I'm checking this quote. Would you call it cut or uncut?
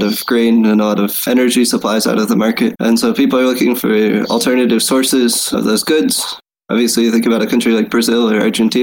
cut